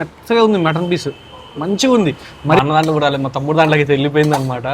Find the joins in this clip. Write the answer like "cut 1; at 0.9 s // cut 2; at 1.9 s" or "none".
cut 1; at 2.6 s